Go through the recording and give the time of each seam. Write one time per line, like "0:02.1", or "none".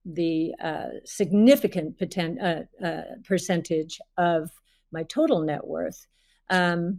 none